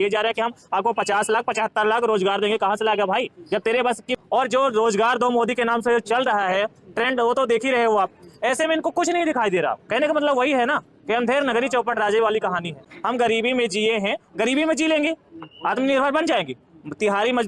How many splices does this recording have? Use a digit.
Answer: 2